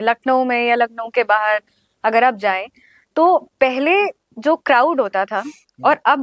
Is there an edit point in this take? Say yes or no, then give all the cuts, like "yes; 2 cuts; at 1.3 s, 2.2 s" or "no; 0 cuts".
no; 0 cuts